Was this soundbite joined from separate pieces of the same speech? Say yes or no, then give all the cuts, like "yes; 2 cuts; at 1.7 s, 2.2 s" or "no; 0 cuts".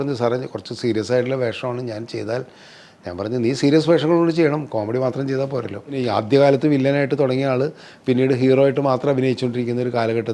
yes; 1 cut; at 6.0 s